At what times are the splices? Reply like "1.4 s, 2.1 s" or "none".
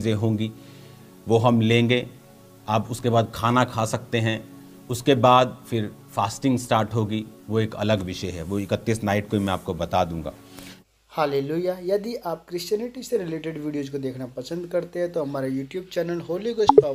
10.8 s